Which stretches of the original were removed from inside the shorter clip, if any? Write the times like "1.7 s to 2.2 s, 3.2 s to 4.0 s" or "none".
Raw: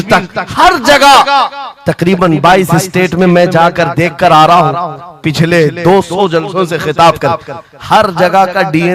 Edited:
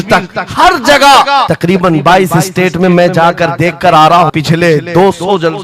1.5 s to 1.9 s, 4.7 s to 5.2 s

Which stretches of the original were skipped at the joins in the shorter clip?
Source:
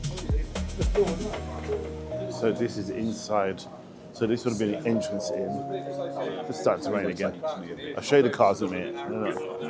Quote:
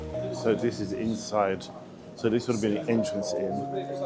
none

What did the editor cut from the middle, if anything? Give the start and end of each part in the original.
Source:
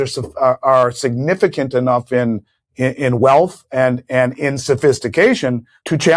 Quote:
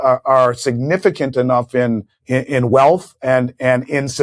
2.5 s to 2.6 s

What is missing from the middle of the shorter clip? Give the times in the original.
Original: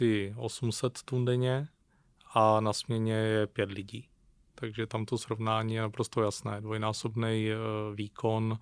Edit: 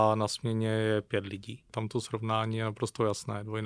4.2 s to 4.9 s

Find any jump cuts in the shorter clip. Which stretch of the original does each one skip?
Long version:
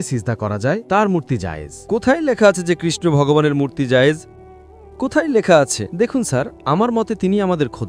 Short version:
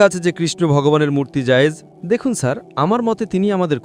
4.4 s to 5.8 s

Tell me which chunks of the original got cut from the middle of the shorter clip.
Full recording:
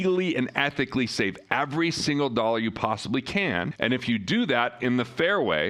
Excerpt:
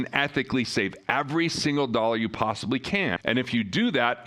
3.6 s to 3.7 s

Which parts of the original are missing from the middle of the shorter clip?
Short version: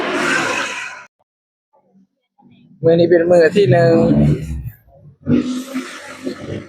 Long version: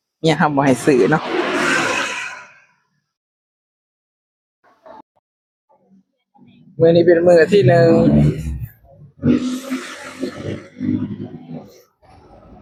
2.5 s to 5.0 s

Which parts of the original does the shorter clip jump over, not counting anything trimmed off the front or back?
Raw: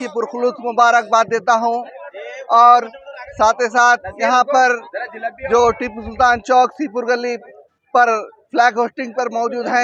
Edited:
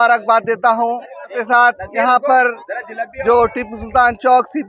2.2 s to 3.6 s

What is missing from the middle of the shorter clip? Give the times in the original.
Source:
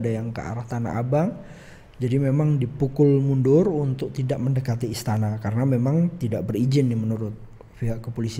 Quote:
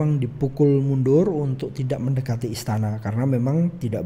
none

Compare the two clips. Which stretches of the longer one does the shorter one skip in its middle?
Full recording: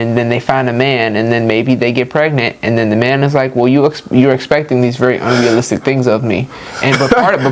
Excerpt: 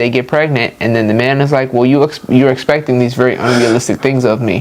none

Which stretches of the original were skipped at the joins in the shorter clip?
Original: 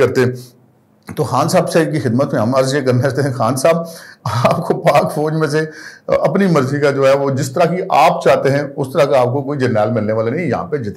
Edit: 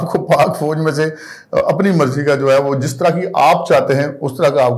none

